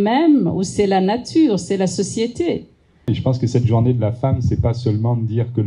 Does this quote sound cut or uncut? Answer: cut